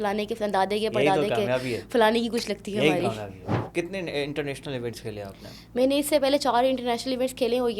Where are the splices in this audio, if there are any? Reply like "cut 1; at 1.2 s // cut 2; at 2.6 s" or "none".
cut 1; at 3.6 s